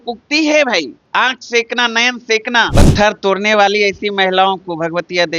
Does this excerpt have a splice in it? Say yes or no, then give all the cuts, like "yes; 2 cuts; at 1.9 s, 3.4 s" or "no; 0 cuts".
yes; 2 cuts; at 1.0 s, 2.7 s